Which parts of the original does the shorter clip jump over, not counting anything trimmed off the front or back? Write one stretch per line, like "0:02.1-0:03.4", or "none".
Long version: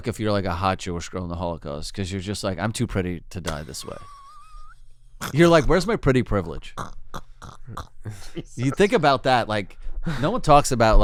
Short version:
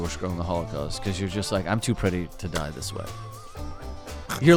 none